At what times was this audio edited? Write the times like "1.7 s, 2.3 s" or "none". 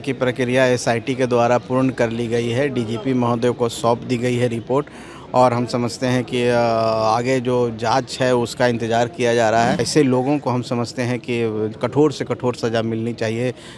9.9 s